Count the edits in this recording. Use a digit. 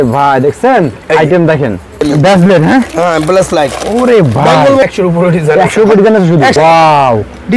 3